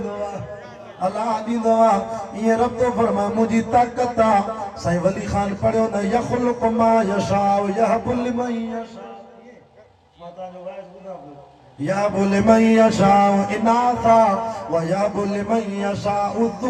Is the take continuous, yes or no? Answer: yes